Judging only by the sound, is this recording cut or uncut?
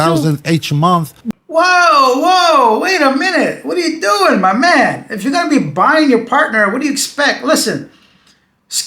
uncut